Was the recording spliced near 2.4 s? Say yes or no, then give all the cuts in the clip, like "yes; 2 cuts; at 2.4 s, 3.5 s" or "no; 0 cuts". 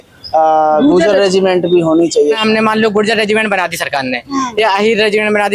yes; 1 cut; at 2.4 s